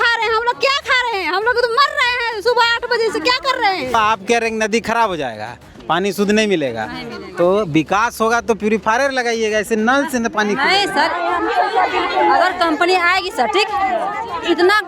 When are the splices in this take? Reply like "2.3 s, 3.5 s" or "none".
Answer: 4.0 s

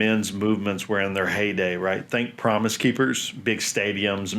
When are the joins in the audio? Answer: none

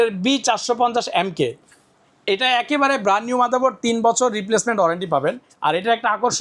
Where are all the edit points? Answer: none

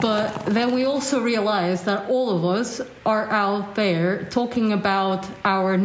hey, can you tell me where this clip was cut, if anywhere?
none

